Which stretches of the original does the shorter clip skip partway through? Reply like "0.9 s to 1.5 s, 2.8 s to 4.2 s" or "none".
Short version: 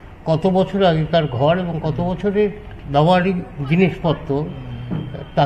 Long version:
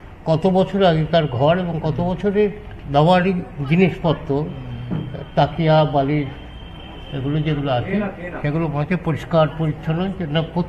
none